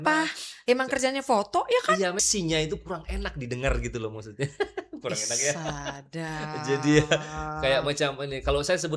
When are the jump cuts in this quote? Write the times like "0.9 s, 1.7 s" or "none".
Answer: 2.2 s